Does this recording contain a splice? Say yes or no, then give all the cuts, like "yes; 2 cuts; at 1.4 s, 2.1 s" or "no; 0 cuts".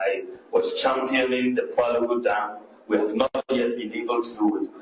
no; 0 cuts